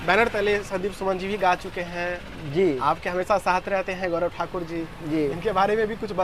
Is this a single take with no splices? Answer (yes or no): yes